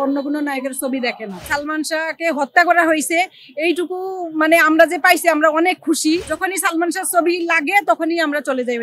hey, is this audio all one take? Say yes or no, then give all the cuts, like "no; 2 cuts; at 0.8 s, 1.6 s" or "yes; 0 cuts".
no; 2 cuts; at 1.5 s, 6.3 s